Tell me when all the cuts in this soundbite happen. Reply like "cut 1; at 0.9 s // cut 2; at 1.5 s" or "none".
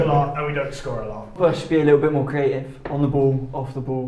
cut 1; at 1.4 s